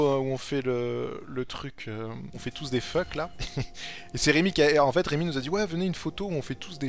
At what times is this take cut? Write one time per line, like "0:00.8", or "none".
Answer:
0:02.4